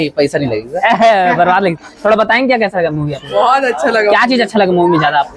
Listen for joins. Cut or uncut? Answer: uncut